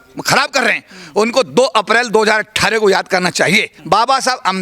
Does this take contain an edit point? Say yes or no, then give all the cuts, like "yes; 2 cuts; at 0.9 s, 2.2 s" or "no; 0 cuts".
yes; 1 cut; at 3.7 s